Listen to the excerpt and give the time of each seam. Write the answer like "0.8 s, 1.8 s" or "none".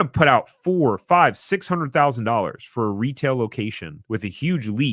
3.9 s